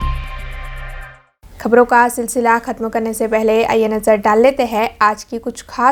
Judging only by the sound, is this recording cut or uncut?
uncut